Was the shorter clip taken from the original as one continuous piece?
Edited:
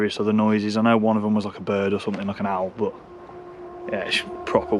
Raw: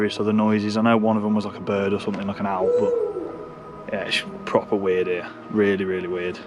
yes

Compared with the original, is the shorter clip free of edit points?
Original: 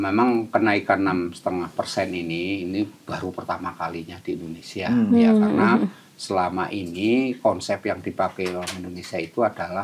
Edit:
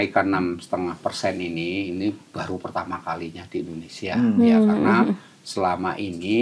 yes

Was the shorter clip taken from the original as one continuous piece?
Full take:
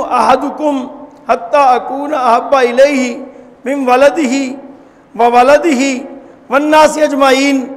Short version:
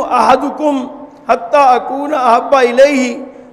yes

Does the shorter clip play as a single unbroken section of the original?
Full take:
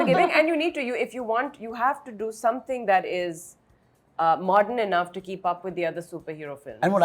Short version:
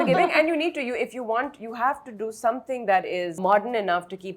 no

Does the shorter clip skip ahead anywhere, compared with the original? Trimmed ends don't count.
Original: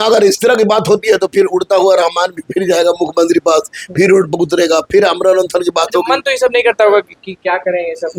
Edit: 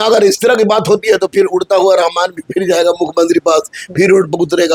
no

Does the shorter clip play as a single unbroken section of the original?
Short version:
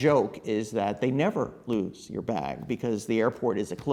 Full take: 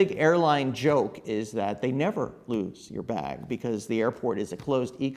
yes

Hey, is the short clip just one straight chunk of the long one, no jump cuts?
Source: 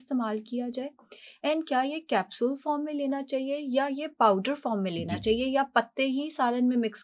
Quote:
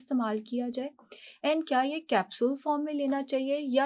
yes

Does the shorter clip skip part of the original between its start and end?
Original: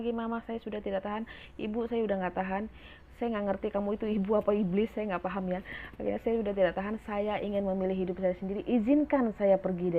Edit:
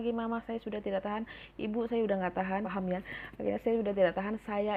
yes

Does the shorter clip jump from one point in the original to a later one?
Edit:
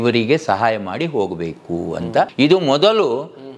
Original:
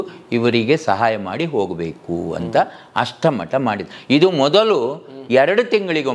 yes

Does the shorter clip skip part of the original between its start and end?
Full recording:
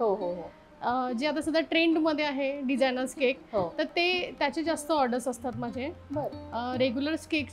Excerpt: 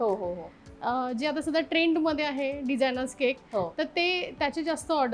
no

